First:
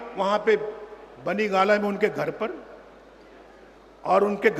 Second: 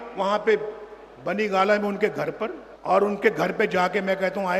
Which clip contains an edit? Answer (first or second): second